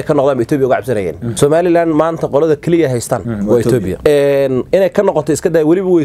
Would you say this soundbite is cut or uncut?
cut